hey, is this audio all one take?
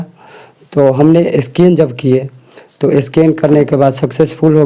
yes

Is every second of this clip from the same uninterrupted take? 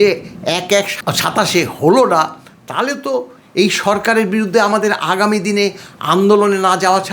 no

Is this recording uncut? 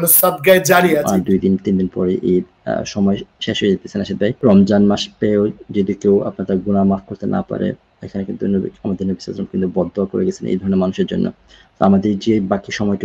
no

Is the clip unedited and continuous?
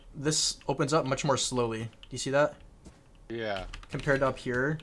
yes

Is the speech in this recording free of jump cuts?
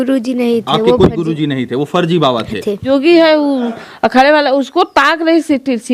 no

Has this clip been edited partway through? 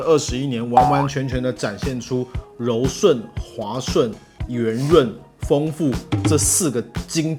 no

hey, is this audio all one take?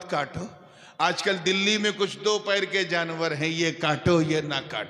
yes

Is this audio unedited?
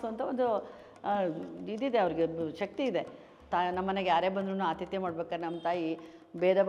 no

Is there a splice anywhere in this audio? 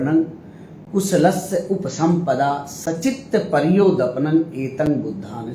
no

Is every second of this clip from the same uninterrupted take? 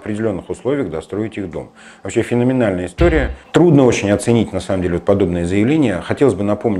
no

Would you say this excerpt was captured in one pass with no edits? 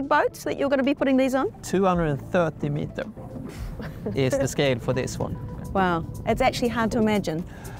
yes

